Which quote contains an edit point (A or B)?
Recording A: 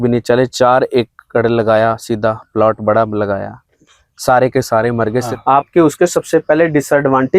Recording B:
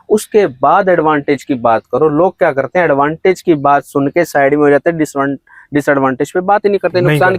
A